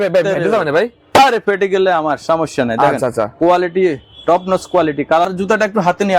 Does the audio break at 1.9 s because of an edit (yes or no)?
no